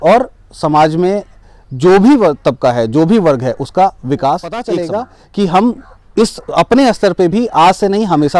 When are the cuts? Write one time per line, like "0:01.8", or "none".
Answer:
0:04.7